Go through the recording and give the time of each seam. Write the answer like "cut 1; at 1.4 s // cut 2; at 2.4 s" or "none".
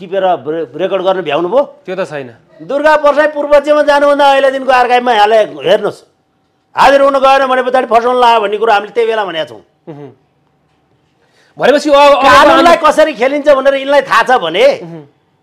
cut 1; at 2.6 s